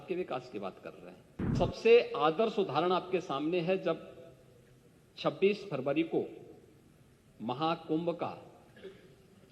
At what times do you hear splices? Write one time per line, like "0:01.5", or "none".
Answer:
0:01.5